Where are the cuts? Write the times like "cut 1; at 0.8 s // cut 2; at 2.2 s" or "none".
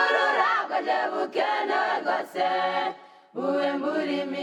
none

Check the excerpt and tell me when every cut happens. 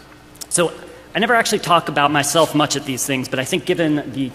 none

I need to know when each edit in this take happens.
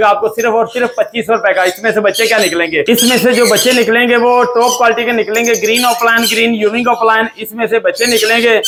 none

